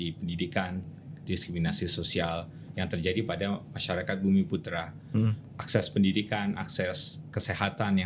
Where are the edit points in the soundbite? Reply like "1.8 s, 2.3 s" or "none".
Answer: 5.4 s